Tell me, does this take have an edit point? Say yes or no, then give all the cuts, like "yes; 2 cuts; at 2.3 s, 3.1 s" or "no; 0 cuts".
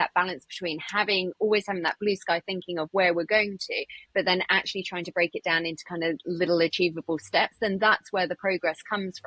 no; 0 cuts